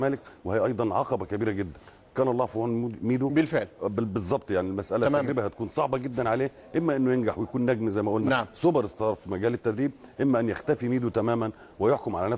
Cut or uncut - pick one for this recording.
cut